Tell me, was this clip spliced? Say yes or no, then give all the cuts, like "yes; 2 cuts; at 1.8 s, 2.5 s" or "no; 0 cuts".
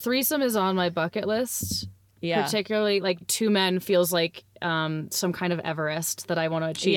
yes; 1 cut; at 3.2 s